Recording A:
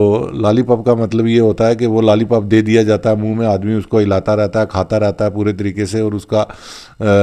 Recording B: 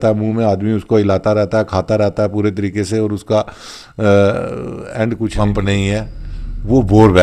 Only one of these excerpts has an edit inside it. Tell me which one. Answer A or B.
B